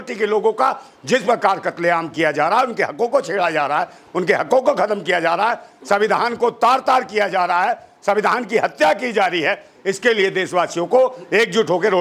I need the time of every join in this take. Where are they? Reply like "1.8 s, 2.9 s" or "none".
none